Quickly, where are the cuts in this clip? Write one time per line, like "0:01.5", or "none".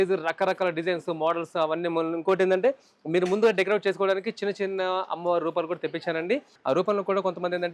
0:06.5